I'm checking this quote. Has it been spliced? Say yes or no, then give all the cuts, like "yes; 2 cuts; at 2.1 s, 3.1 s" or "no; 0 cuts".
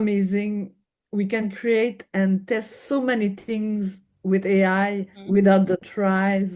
yes; 1 cut; at 5.1 s